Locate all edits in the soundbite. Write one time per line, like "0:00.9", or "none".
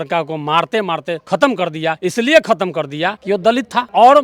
0:01.2
0:02.0
0:03.5